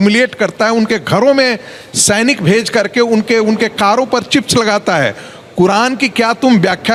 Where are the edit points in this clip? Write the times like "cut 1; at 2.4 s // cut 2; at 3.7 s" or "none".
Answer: none